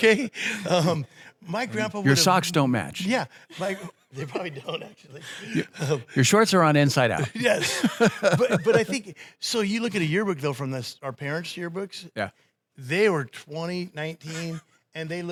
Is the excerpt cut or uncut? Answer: uncut